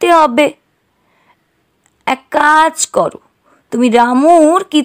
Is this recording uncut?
yes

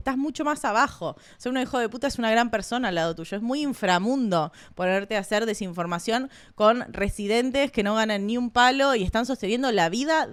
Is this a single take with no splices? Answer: yes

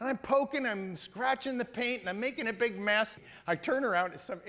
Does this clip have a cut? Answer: yes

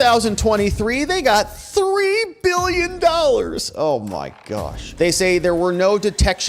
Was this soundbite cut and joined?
yes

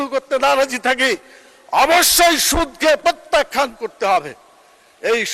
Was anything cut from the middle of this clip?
no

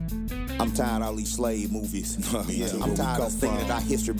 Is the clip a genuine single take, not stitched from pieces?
no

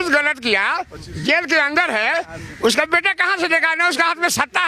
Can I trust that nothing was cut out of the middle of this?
yes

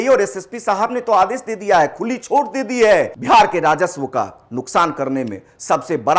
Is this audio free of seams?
no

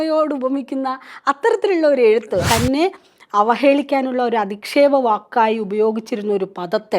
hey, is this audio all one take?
no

